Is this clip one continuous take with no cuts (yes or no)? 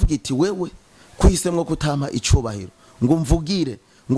yes